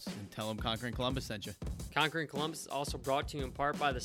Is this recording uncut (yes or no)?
no